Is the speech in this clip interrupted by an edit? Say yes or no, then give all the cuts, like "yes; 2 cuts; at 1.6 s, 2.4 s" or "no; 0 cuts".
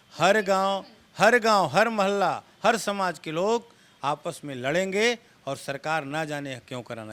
no; 0 cuts